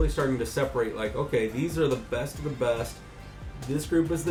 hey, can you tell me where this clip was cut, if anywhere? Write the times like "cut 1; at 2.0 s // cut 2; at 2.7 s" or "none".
none